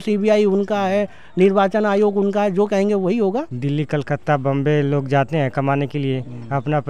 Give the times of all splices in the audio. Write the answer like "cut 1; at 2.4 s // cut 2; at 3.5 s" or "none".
cut 1; at 3.5 s